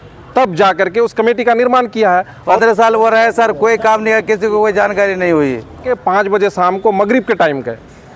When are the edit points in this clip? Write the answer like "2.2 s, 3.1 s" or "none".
2.6 s, 5.9 s